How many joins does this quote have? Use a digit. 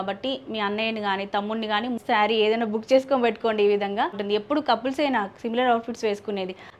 2